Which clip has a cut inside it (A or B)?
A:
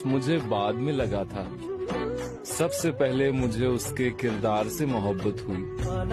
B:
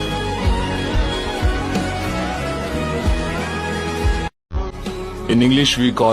B